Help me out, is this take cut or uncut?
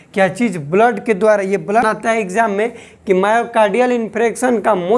cut